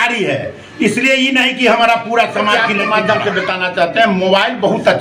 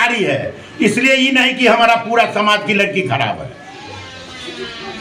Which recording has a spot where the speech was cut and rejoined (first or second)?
first